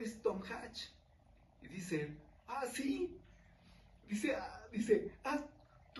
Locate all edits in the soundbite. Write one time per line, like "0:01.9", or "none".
none